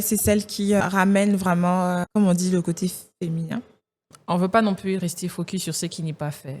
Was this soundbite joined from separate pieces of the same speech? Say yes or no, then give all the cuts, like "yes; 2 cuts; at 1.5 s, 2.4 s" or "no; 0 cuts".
yes; 3 cuts; at 0.8 s, 2.1 s, 3.9 s